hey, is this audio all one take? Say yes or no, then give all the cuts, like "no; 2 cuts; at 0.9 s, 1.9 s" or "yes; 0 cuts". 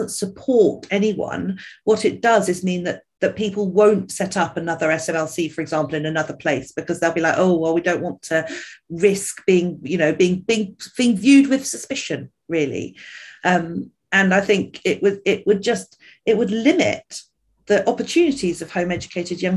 yes; 0 cuts